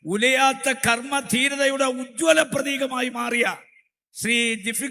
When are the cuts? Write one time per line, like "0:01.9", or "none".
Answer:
none